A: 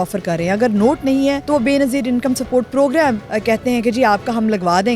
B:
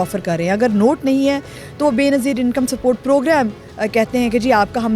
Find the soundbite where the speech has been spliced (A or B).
A